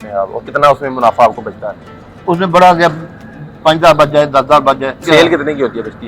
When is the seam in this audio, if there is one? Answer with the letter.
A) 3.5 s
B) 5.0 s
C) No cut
B